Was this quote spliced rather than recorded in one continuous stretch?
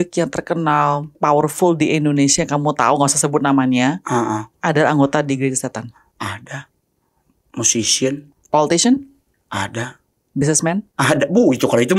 yes; 2 cuts; at 1.1 s, 8.3 s

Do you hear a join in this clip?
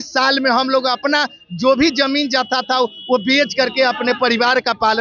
no; 0 cuts

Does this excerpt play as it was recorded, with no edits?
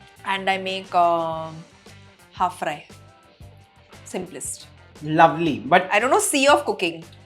yes; 0 cuts

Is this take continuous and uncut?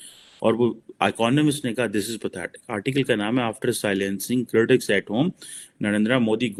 yes; 0 cuts

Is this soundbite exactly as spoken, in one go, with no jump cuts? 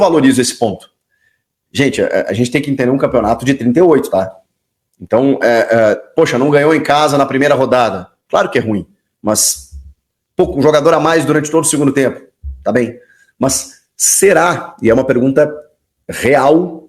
yes; 0 cuts

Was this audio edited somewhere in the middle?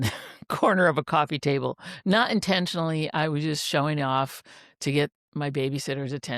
no; 0 cuts

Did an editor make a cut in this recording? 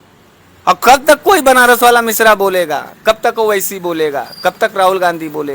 no; 0 cuts

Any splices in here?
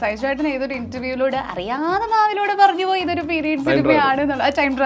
no; 0 cuts

